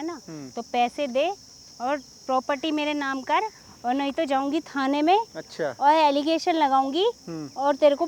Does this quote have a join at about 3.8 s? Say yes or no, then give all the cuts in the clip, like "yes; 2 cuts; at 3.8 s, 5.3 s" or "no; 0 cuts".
no; 0 cuts